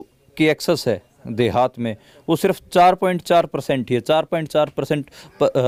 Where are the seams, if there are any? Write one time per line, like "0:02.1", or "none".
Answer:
none

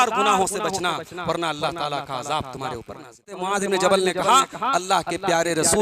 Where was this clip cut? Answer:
0:03.4

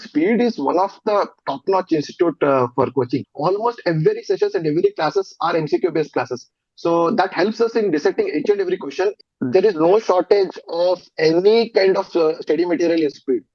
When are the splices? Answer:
0:03.3
0:09.2

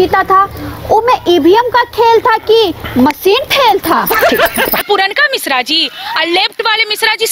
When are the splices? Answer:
0:04.8

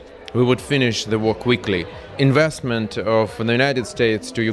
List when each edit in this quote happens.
0:02.0

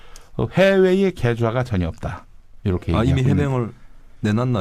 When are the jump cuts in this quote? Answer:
none

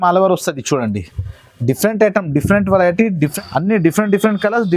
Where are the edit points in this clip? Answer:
0:03.3

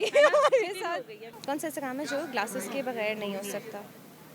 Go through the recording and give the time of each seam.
0:01.3

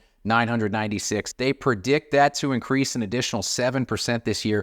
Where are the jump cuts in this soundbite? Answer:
0:01.3

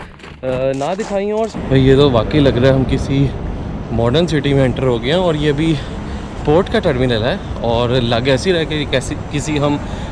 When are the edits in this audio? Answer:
0:01.5

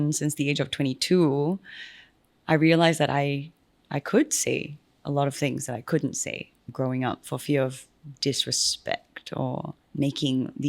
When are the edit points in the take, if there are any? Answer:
0:06.7
0:09.8

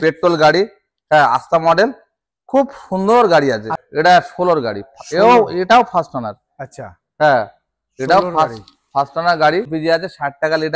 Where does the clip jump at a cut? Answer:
0:03.8
0:09.7

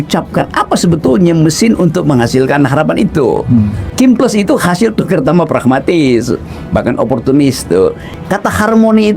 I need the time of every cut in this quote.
0:03.9
0:08.1

